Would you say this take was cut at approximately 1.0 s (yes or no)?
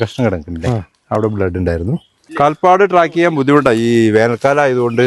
no